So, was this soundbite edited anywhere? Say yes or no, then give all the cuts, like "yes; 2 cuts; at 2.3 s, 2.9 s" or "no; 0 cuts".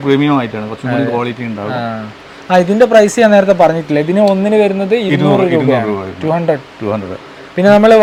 no; 0 cuts